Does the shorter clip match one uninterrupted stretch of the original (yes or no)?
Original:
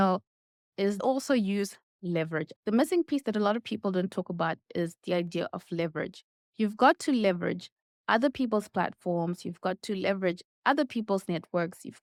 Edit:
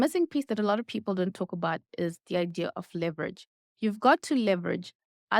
yes